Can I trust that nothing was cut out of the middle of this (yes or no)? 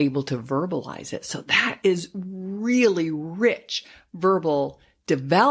yes